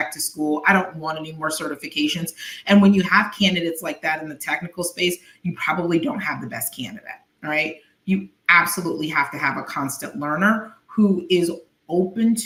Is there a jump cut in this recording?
no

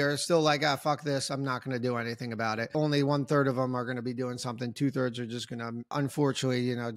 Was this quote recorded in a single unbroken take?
no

